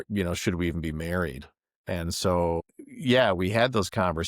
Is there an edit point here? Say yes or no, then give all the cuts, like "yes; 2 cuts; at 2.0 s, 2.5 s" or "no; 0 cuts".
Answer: yes; 2 cuts; at 1.7 s, 2.6 s